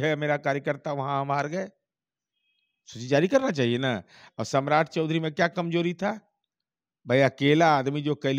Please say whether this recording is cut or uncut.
uncut